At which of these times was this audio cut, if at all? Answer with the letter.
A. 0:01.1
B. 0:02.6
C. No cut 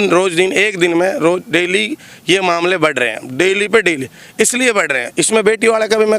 C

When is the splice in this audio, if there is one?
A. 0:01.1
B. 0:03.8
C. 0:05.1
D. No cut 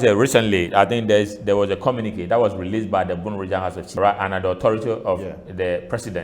B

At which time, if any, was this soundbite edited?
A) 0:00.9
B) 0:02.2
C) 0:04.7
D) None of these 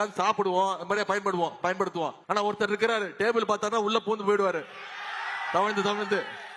B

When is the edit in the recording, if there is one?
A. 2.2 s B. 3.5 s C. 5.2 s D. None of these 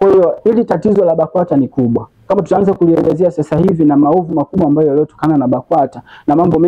D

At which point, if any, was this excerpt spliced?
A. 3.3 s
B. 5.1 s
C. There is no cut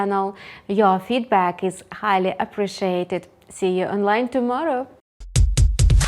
B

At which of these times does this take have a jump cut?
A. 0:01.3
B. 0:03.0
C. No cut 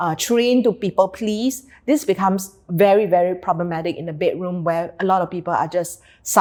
C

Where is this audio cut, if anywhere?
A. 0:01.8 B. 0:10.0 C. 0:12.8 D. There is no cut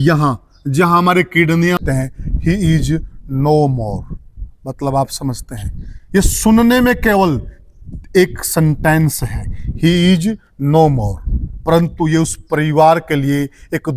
A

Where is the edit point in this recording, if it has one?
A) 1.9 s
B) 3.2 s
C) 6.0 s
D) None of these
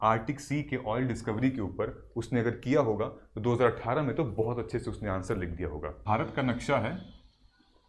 C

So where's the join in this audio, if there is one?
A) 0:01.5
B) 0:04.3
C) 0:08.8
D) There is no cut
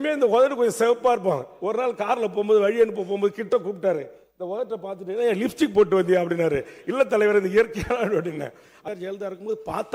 C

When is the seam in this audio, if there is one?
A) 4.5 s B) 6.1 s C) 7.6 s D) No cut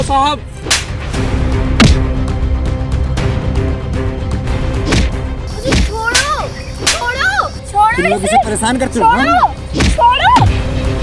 A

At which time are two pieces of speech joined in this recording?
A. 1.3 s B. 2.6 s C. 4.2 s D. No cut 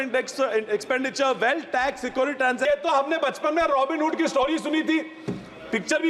B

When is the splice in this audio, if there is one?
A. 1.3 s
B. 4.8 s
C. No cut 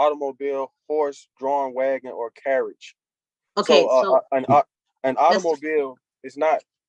C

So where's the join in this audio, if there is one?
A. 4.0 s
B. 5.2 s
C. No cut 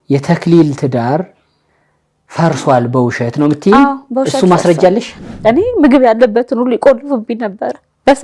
B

